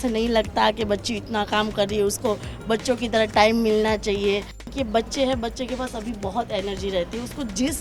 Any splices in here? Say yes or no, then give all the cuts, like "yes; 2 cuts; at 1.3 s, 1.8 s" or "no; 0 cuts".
yes; 1 cut; at 4.7 s